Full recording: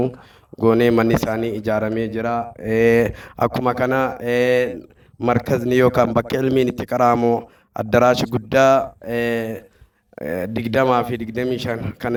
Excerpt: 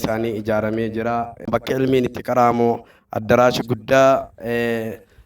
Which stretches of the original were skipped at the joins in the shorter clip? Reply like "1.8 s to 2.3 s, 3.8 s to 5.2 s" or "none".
2.7 s to 6.1 s